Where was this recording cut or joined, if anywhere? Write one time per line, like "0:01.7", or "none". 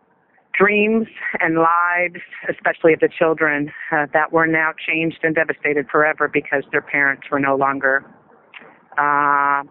none